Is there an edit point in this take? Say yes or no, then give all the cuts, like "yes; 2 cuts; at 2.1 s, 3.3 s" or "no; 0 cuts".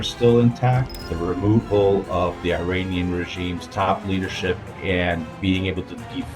yes; 1 cut; at 1.1 s